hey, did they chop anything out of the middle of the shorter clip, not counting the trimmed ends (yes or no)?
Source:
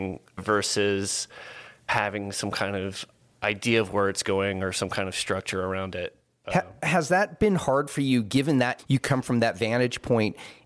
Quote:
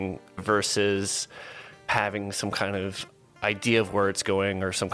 no